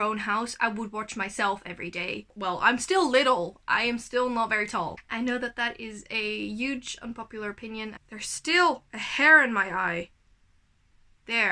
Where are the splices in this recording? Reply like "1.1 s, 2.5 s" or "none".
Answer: 2.3 s, 5.0 s, 7.9 s